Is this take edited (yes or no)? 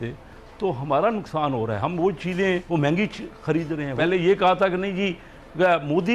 yes